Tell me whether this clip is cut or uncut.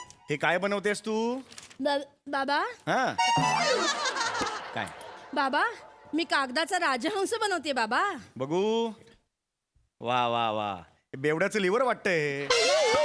uncut